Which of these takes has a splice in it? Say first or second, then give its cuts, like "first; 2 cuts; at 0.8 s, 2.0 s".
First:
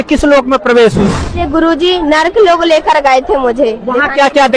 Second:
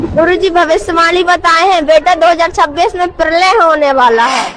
first; 1 cut; at 1.4 s